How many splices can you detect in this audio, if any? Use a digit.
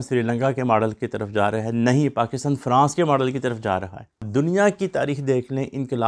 1